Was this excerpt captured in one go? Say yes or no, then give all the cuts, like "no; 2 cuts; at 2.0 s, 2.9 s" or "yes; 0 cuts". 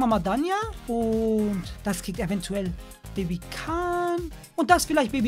yes; 0 cuts